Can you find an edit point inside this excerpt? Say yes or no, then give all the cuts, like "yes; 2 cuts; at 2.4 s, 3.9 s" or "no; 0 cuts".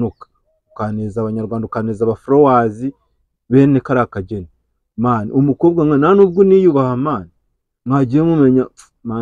no; 0 cuts